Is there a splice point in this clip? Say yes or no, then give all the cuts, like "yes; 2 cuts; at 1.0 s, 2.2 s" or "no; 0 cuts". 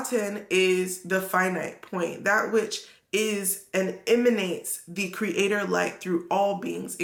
no; 0 cuts